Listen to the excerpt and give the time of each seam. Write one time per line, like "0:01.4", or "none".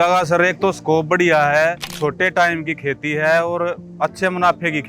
0:01.9